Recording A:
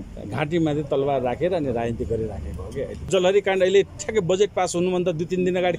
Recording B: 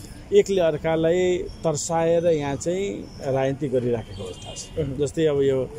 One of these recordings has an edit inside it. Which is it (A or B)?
A